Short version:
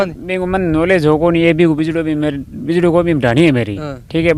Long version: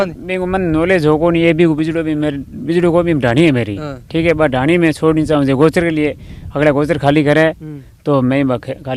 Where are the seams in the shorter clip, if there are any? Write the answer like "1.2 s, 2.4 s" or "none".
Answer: none